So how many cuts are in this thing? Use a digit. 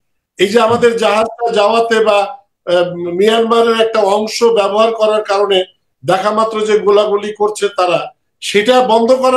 0